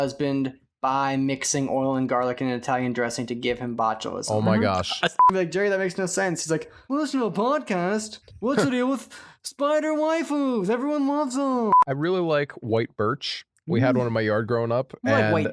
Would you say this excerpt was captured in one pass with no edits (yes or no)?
no